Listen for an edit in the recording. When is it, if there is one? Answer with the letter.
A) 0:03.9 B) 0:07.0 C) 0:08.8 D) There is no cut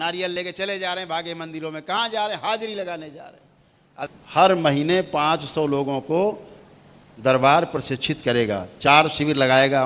A